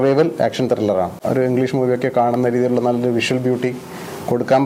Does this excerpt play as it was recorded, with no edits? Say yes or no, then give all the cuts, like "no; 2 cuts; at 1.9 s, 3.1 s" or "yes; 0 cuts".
no; 1 cut; at 1.2 s